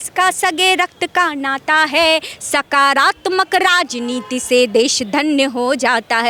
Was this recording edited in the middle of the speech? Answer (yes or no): no